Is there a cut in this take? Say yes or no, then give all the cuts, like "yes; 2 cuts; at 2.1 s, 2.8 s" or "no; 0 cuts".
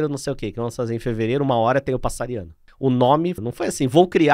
yes; 2 cuts; at 2.6 s, 3.4 s